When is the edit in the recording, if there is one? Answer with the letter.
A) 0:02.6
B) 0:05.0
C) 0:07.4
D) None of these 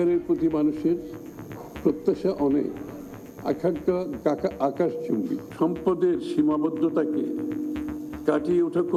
D